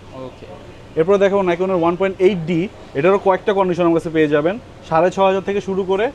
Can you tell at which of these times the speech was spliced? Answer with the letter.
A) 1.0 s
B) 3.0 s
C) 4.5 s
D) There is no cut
D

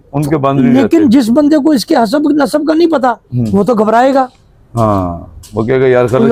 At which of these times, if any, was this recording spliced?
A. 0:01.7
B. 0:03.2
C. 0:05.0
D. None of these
D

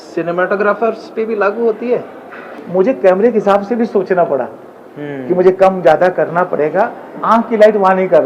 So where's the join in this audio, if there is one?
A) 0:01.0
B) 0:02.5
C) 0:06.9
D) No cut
B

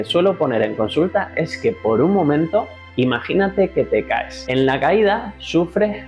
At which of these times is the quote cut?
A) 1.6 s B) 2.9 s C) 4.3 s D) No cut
C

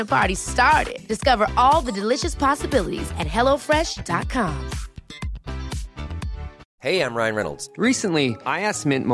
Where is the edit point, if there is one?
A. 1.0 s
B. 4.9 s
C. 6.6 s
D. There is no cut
C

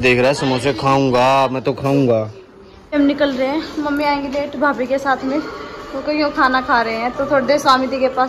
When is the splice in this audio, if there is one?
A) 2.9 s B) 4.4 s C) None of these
A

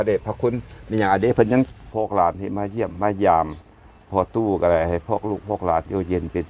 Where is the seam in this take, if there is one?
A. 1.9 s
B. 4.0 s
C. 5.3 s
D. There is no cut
A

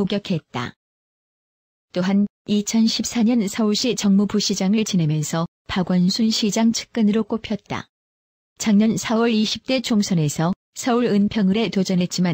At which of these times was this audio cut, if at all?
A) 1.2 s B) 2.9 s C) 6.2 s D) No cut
C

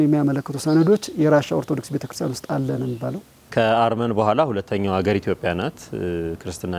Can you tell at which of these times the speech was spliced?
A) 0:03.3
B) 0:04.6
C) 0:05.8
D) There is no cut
A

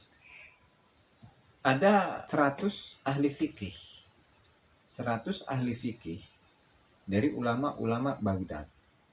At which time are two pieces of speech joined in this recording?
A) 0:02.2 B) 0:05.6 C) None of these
A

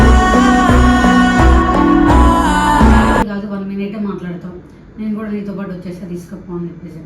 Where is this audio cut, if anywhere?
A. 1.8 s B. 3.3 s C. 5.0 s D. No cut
B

